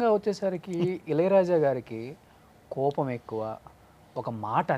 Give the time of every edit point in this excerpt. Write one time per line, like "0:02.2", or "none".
none